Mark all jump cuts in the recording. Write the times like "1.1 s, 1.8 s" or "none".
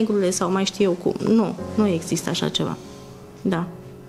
none